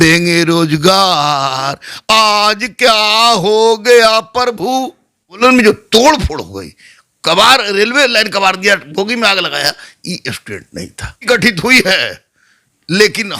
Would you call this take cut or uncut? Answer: cut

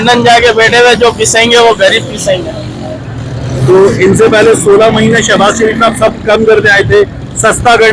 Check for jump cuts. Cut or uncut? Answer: uncut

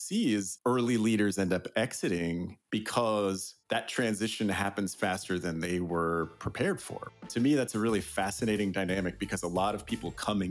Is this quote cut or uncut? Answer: cut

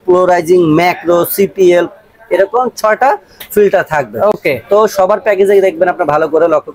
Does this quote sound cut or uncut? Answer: uncut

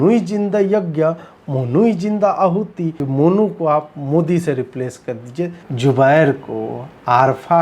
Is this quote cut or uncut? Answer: cut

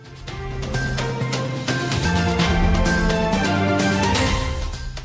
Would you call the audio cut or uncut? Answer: uncut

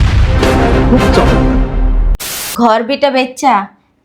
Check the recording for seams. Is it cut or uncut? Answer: cut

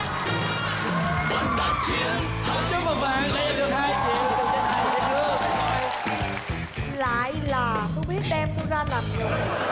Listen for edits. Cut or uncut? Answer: uncut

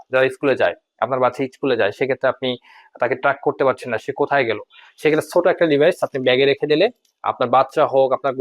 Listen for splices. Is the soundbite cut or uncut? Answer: uncut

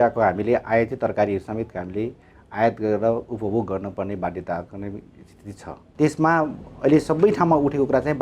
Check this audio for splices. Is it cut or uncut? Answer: cut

